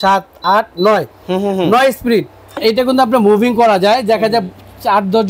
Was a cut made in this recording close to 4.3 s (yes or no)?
no